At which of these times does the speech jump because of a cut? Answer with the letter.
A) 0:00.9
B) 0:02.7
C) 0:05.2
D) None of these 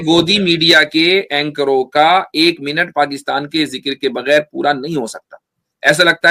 D